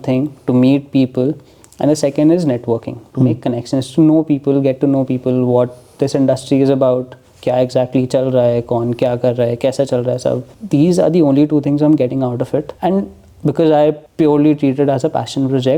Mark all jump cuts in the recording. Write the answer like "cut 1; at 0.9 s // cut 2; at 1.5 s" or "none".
cut 1; at 10.5 s // cut 2; at 12.7 s // cut 3; at 14.0 s